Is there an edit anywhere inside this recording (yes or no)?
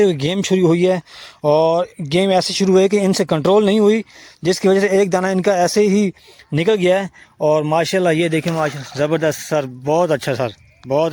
no